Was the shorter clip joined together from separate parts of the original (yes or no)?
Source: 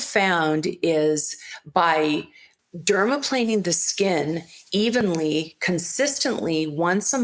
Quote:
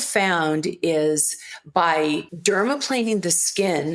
yes